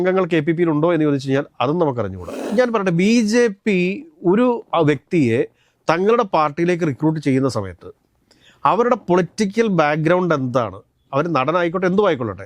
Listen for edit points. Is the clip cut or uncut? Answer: cut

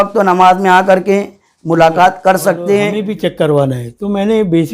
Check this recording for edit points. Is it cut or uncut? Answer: cut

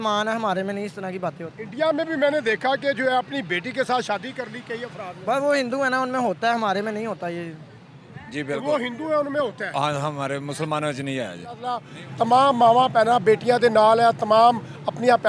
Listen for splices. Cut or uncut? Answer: cut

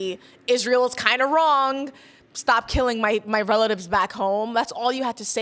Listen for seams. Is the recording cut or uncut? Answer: uncut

